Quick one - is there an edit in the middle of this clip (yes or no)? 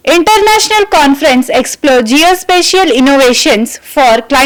no